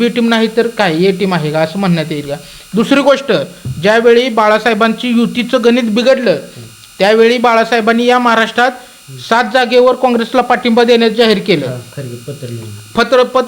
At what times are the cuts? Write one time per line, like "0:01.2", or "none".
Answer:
none